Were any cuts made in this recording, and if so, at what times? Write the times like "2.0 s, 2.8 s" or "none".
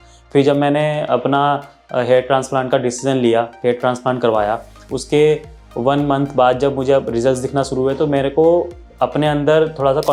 none